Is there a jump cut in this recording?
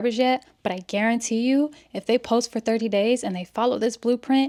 no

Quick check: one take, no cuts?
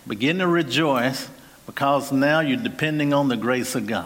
yes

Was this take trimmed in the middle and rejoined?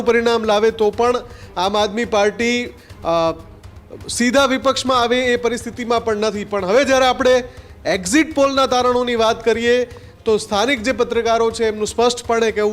no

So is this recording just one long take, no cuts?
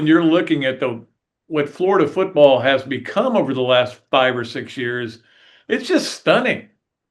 yes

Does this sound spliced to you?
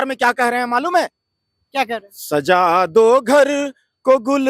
no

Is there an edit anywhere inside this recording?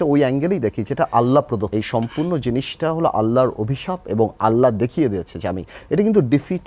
yes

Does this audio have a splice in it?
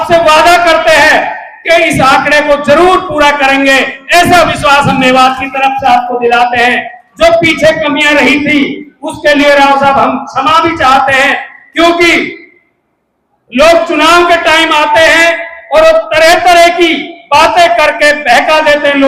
no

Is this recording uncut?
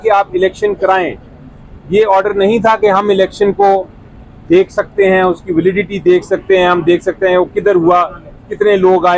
yes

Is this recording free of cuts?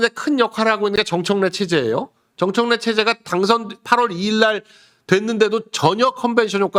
yes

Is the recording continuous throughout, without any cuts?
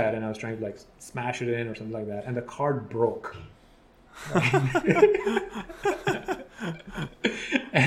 yes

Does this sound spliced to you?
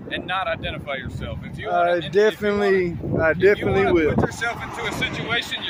no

